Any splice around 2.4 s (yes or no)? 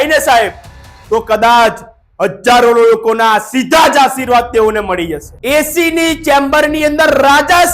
no